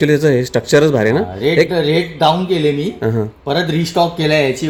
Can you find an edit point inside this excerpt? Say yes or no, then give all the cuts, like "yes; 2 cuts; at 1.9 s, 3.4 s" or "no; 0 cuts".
no; 0 cuts